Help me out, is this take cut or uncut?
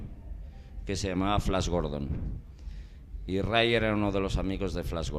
cut